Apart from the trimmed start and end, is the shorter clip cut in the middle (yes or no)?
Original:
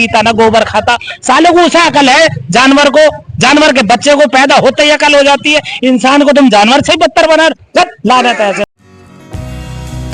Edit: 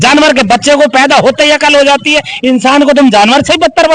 no